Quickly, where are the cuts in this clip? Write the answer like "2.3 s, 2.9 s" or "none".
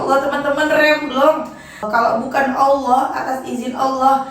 1.9 s